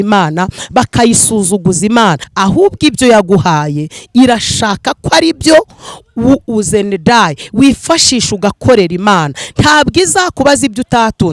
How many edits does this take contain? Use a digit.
1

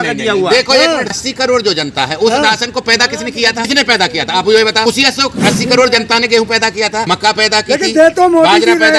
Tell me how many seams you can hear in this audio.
4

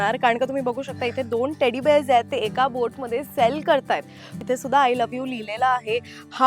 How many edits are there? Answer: 1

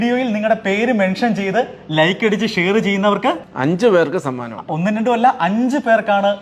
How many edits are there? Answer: 1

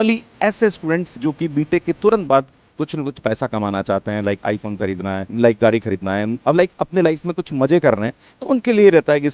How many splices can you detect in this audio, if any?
0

